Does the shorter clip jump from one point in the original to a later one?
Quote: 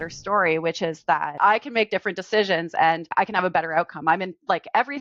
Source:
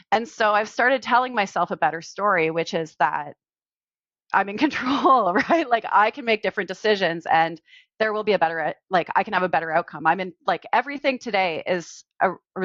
yes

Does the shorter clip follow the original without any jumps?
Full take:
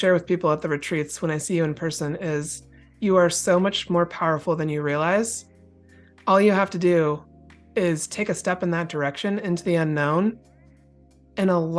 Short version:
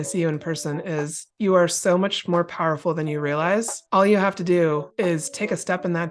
no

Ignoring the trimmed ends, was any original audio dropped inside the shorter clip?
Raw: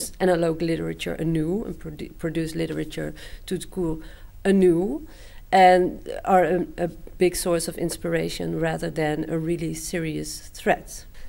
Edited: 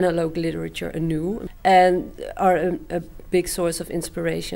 yes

